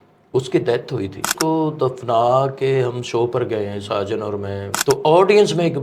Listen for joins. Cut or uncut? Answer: cut